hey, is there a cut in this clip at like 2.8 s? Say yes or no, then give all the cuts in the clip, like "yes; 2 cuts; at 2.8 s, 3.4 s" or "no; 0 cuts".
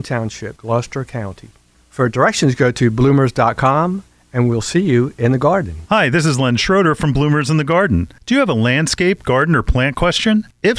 no; 1 cut; at 5.7 s